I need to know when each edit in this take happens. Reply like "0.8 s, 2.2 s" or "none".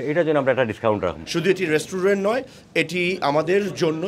1.2 s